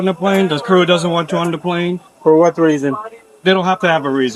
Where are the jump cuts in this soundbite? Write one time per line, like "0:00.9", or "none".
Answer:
none